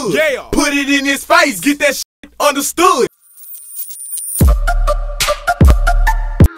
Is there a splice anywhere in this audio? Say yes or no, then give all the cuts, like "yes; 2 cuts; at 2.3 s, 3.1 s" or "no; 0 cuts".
yes; 1 cut; at 3.2 s